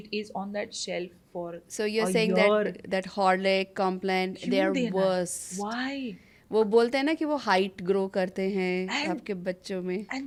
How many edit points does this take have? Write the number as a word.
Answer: zero